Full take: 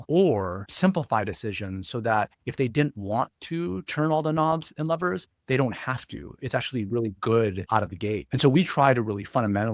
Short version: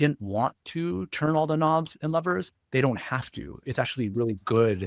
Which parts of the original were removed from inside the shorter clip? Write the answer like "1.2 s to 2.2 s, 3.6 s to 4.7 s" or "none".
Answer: none